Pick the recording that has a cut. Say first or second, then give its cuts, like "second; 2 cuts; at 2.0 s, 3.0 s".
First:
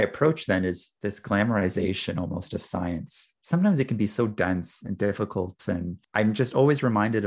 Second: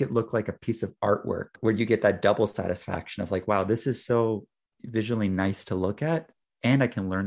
first; 1 cut; at 0.9 s